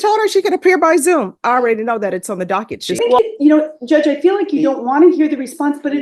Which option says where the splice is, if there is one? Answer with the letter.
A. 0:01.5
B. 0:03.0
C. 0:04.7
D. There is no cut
B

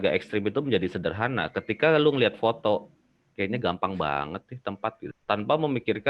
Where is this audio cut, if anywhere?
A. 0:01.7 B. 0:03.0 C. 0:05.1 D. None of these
C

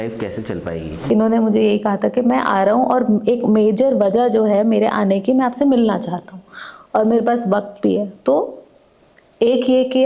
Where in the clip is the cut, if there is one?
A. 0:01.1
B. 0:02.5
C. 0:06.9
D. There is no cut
A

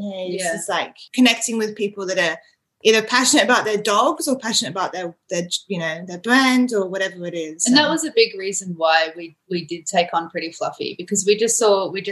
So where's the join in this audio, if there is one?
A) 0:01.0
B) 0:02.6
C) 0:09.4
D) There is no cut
A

